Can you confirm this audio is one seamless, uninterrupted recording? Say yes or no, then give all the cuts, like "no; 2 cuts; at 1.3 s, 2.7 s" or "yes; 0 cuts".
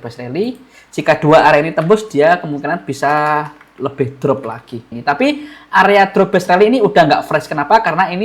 no; 1 cut; at 4.9 s